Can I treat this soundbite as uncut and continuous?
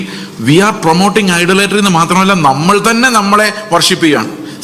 yes; 0 cuts

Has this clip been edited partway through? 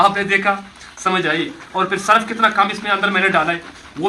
no; 0 cuts

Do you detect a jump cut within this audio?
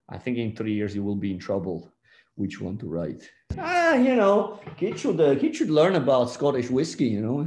yes; 1 cut; at 3.5 s

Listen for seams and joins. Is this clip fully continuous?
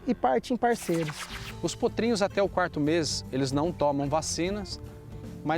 no; 1 cut; at 1.2 s

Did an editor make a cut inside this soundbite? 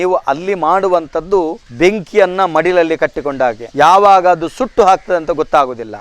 no; 0 cuts

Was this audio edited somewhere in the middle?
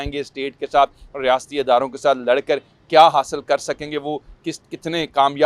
no; 0 cuts

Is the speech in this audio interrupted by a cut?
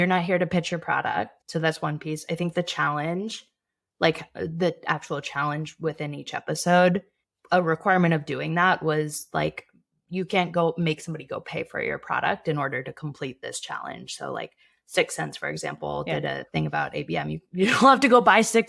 no; 0 cuts

